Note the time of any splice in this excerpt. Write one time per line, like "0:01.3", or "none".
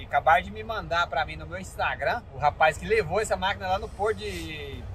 0:02.3

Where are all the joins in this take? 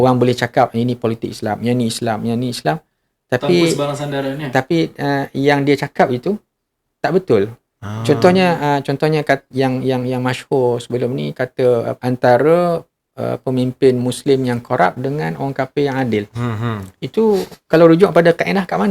0:11.9

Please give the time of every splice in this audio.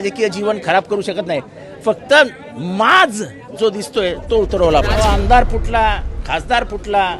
0:04.9

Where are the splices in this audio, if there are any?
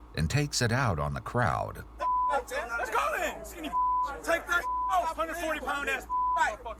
none

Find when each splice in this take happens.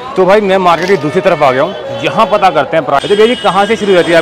0:03.0

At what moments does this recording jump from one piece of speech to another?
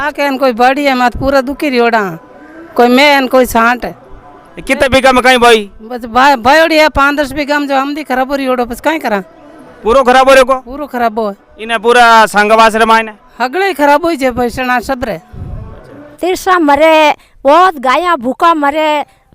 0:16.0

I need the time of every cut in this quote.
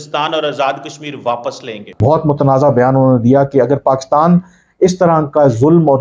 0:02.0

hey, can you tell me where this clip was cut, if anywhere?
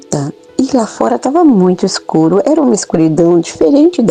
none

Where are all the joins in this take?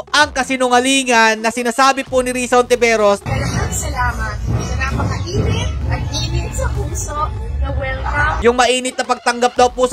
0:03.3
0:08.4

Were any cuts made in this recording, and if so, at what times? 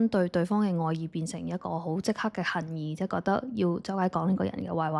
none

